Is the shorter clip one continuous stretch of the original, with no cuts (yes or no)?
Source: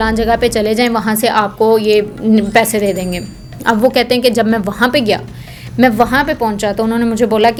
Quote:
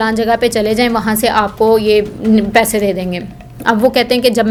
yes